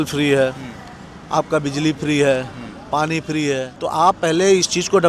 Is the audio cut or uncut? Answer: cut